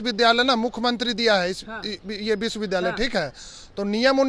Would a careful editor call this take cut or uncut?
uncut